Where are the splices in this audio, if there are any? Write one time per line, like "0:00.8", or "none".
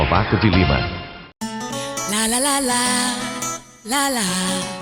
0:01.1